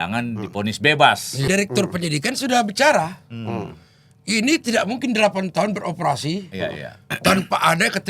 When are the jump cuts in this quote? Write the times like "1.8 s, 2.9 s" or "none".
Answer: 1.4 s

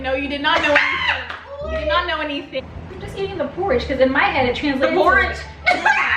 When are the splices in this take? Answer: 2.7 s

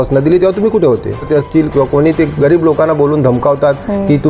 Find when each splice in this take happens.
1.3 s

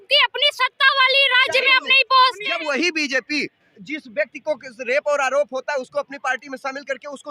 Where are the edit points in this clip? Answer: 2.5 s

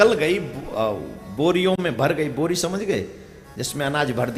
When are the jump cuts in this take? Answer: none

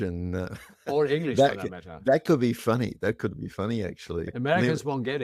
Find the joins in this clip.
4.3 s

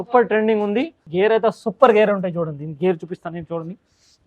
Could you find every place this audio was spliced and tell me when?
1.0 s

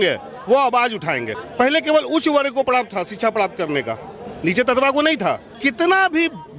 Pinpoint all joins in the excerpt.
1.4 s, 5.5 s

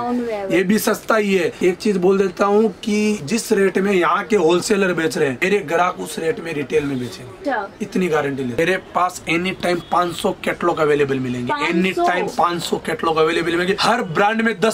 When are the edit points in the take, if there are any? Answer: 8.6 s

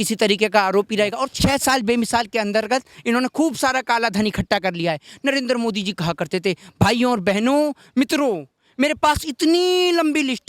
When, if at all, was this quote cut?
1.2 s

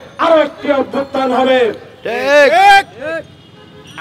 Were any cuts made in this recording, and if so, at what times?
none

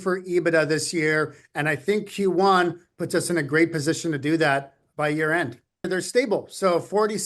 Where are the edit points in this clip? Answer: 5.9 s

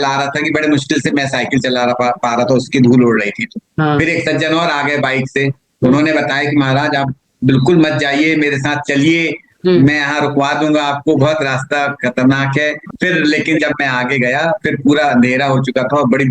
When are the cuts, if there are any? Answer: 12.9 s

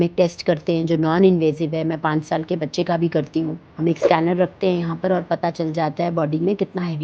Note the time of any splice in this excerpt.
3.6 s

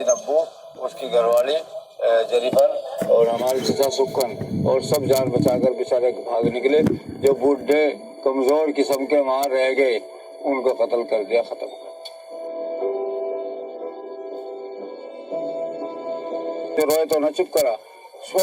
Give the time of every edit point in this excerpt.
16.7 s

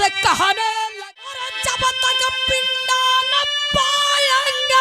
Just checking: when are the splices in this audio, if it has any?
0.9 s

